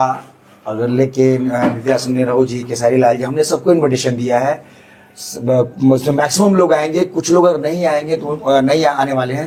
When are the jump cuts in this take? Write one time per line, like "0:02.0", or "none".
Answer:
none